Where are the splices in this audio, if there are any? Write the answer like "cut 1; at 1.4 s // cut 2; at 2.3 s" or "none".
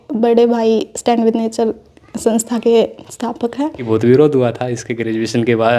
cut 1; at 3.9 s